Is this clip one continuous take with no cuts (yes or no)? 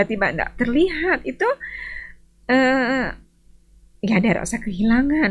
yes